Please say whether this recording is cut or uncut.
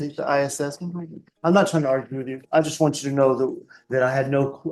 uncut